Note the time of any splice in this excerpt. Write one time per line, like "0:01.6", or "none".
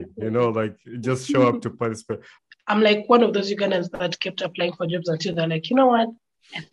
0:02.3